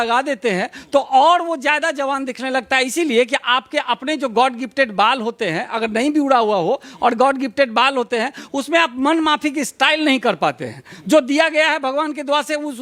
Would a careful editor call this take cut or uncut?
uncut